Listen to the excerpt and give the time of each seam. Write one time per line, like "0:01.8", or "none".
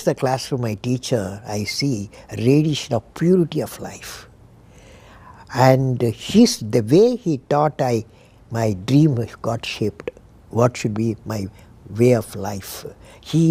none

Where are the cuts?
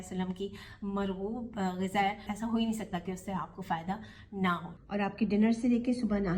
0:02.3
0:04.7

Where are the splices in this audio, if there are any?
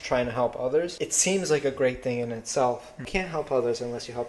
0:01.0
0:03.0

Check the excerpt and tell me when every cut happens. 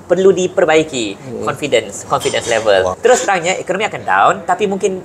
0:02.9

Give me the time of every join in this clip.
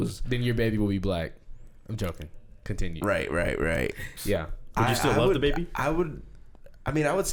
none

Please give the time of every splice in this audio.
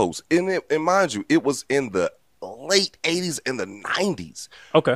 none

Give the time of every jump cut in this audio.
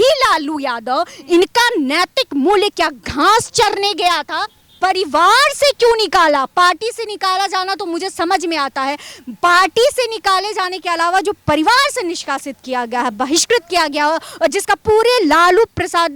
0:04.6

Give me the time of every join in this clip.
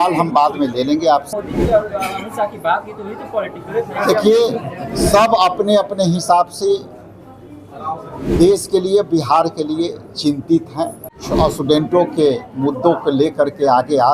0:01.4
0:11.2

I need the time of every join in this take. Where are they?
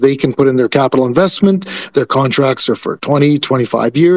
none

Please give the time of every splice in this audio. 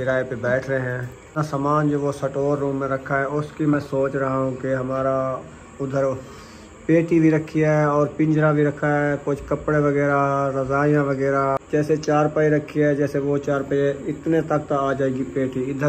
0:01.4
0:11.6

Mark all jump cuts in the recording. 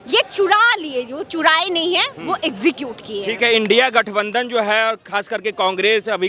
none

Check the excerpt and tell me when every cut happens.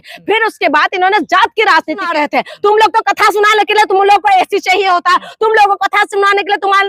0:02.1

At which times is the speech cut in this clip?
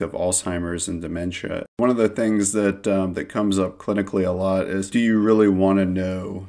0:01.7

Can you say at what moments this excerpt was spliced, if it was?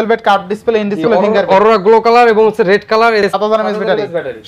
0:03.3

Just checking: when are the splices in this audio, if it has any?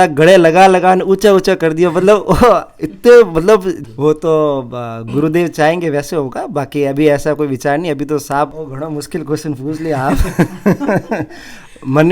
0:03.8
0:08.6

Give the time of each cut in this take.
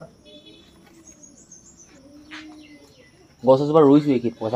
none

